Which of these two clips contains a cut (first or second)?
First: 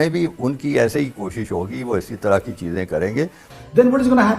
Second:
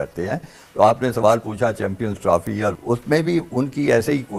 first